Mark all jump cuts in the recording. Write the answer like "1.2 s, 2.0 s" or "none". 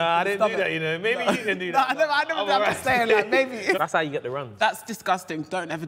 3.8 s